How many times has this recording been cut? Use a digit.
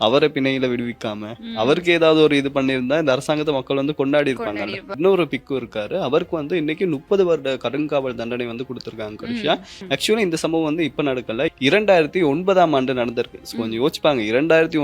2